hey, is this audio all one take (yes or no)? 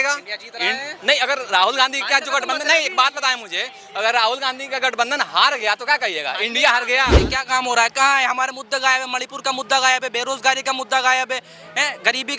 no